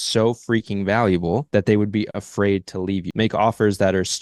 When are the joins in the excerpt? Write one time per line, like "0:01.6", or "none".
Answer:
0:01.5
0:03.1